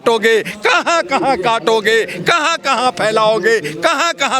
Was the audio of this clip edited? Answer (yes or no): no